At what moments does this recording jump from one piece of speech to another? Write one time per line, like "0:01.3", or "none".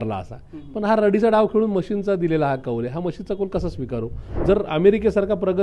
0:04.4